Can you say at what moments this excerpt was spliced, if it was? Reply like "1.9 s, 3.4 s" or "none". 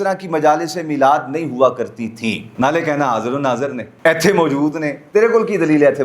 2.4 s, 3.9 s, 5.0 s